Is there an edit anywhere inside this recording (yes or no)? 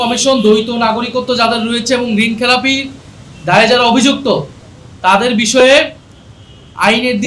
no